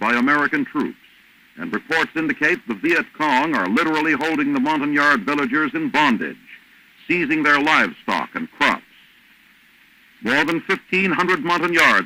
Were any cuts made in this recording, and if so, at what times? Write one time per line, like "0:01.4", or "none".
none